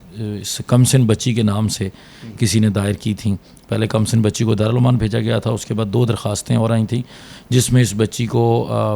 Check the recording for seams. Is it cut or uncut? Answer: uncut